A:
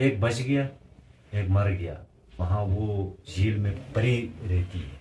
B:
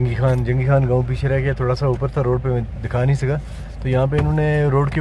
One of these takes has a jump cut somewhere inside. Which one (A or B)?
A